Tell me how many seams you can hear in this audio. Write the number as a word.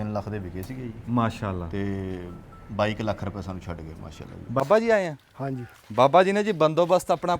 one